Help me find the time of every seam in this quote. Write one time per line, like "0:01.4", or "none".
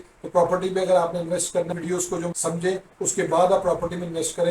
0:02.1